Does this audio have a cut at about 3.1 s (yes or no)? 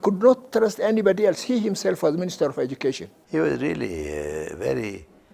yes